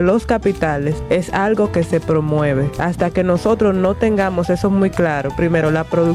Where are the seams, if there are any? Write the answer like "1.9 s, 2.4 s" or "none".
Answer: 1.0 s, 2.7 s